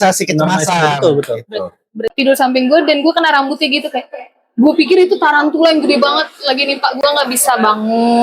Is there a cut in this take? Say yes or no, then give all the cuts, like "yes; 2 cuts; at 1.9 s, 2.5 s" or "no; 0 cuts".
yes; 2 cuts; at 2.0 s, 7.0 s